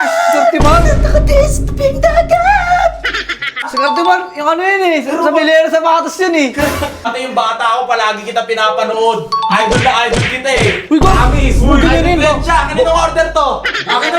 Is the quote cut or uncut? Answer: cut